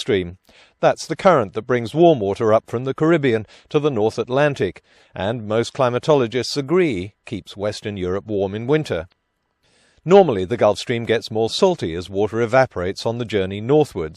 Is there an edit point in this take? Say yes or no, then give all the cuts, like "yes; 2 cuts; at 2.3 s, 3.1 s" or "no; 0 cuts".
yes; 1 cut; at 9.1 s